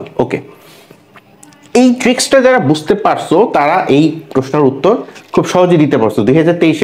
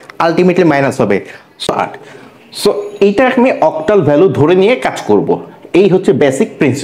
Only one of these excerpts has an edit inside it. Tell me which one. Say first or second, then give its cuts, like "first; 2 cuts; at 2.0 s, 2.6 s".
second; 1 cut; at 1.7 s